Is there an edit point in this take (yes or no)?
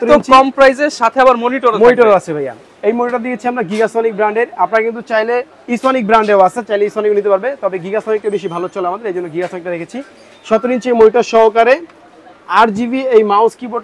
no